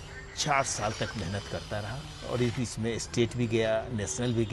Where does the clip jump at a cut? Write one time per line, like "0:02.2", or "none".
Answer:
none